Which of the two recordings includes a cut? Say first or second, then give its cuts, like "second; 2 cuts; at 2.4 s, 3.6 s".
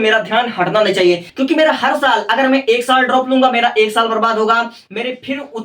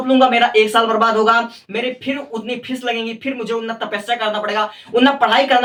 first; 1 cut; at 1.3 s